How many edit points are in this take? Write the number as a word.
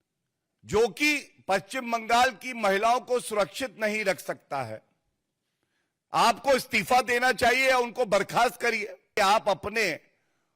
one